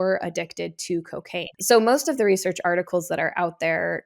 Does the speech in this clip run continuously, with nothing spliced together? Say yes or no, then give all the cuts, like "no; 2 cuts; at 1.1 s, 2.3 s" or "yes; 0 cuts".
no; 1 cut; at 1.6 s